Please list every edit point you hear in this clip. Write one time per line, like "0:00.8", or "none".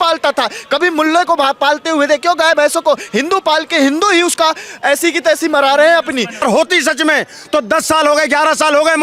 0:06.4